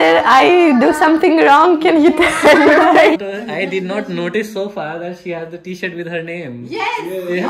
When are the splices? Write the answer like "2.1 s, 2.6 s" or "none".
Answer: 3.2 s